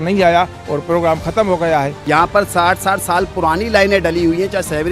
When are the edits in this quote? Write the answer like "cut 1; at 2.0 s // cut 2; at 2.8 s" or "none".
cut 1; at 2.0 s